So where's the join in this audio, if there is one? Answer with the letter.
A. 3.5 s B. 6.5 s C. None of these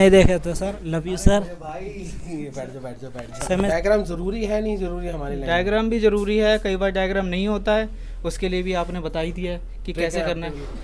A